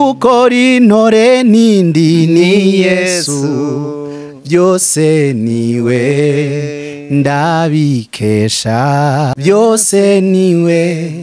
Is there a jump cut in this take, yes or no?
yes